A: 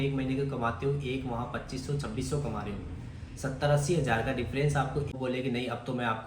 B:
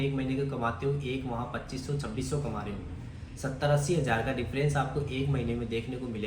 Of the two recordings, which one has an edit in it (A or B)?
A